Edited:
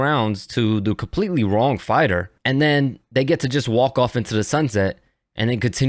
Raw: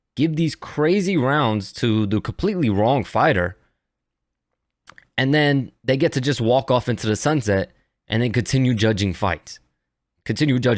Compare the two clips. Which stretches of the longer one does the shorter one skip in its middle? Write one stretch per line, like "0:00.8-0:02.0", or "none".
0:03.6-0:05.1